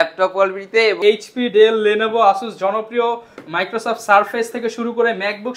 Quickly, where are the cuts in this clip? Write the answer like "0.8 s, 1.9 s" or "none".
1.0 s